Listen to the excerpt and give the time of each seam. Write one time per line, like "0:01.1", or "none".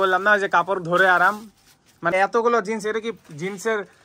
0:02.1

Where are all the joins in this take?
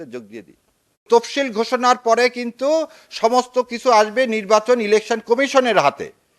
0:01.0

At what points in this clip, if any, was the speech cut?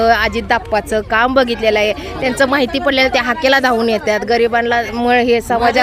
none

